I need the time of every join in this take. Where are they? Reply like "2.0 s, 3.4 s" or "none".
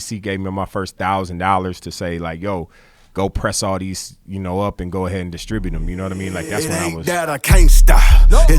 6.5 s